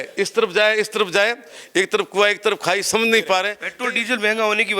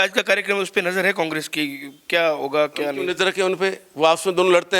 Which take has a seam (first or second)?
first